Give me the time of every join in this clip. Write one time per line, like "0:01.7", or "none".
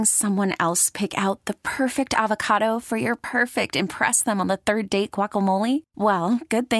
none